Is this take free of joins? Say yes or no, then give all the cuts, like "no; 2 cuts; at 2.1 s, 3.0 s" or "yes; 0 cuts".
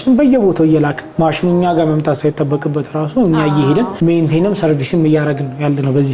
yes; 0 cuts